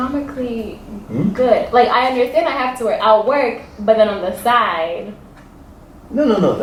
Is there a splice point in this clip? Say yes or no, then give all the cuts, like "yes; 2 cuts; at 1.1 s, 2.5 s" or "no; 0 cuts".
no; 0 cuts